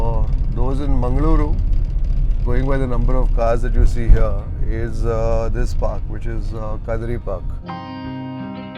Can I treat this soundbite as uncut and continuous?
yes; 0 cuts

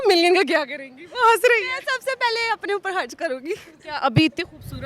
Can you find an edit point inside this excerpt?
no; 0 cuts

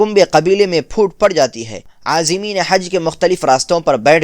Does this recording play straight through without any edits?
no; 1 cut; at 1.9 s

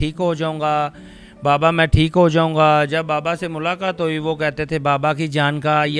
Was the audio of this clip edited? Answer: no; 0 cuts

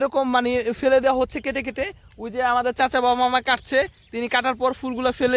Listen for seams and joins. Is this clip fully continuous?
yes; 0 cuts

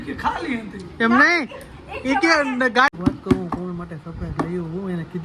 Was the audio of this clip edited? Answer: yes; 1 cut; at 2.9 s

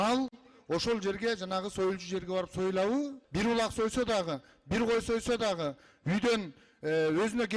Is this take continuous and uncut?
no; 1 cut; at 3.2 s

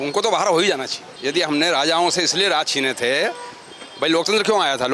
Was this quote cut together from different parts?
yes; 1 cut; at 1.1 s

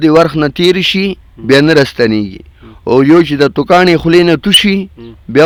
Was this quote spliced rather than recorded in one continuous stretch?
no; 0 cuts

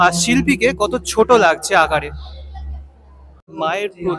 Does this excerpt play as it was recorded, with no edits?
yes; 0 cuts

